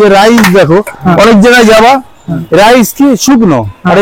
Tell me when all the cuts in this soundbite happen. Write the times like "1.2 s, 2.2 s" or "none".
none